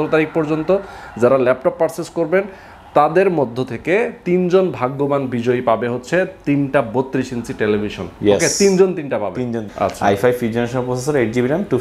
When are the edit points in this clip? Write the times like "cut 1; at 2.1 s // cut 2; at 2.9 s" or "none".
cut 1; at 9.7 s